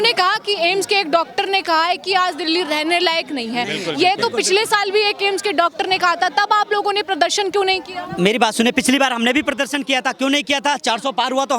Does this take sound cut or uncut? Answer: uncut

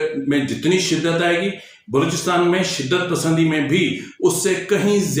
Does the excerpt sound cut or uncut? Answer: uncut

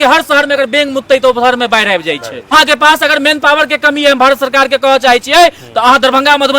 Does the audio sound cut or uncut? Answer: cut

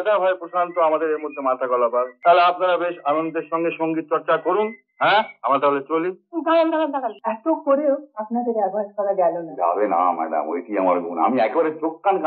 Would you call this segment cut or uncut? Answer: cut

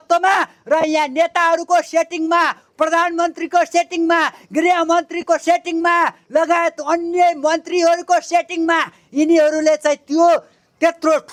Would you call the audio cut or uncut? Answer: uncut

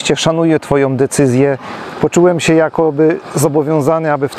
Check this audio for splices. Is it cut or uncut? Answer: cut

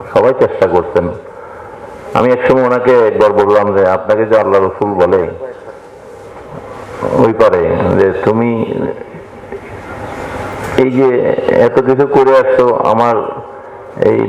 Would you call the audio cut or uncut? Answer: uncut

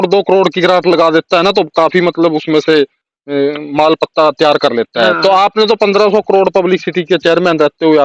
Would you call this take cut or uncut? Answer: uncut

